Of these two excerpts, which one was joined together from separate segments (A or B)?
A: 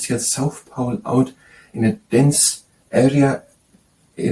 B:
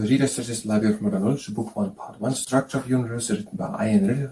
B